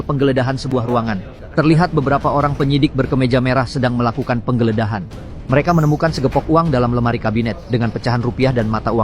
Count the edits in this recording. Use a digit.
1